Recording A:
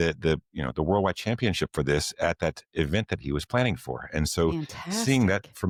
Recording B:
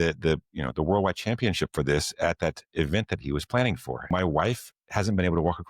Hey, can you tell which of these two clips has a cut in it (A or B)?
B